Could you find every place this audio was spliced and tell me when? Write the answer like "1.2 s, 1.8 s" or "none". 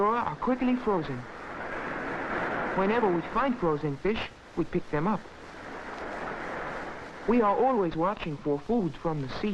7.2 s